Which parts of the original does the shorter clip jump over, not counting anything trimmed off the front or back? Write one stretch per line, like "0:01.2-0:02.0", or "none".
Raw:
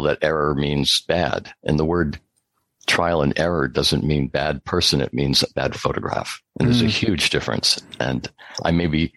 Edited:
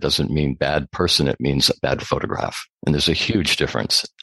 none